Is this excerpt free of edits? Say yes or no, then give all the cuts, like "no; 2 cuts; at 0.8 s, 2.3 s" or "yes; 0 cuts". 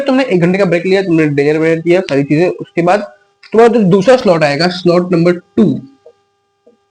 yes; 0 cuts